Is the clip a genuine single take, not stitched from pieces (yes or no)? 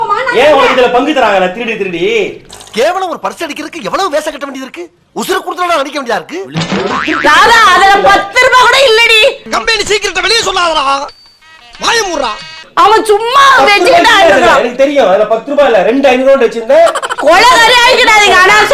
yes